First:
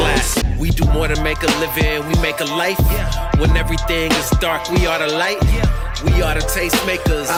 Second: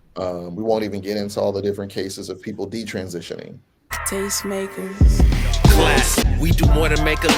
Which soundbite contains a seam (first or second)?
second